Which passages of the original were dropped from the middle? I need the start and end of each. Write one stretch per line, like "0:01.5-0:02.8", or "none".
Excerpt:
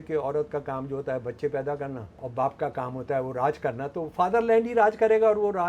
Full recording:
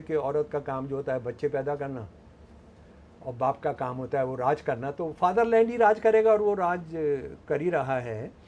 0:02.1-0:03.2